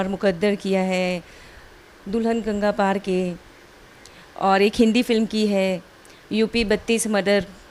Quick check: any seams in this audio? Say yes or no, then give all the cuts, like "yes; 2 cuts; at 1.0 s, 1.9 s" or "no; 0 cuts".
no; 0 cuts